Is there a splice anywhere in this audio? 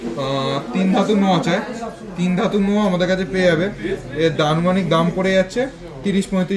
no; 0 cuts

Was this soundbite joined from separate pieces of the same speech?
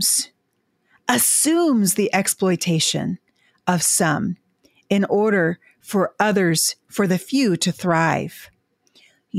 no; 0 cuts

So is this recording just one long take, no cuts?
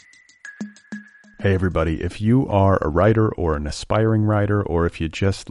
no; 1 cut; at 0.9 s

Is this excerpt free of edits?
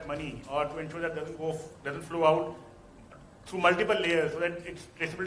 yes; 0 cuts

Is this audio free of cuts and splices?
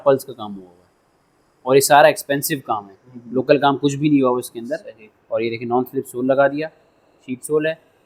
yes; 0 cuts

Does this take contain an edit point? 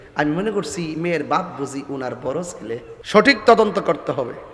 yes; 1 cut; at 2.9 s

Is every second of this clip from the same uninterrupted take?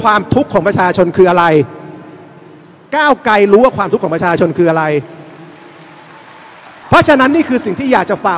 no; 1 cut; at 6.8 s

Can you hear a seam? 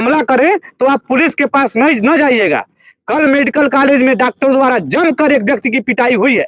no; 0 cuts

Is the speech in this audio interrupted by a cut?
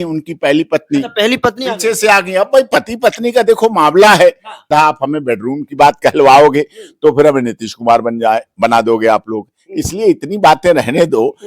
yes; 1 cut; at 4.7 s

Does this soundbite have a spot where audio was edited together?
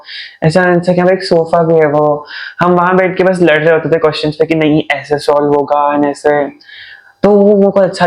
no; 0 cuts

